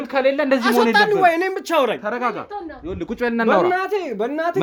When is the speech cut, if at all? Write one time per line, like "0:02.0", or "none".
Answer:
none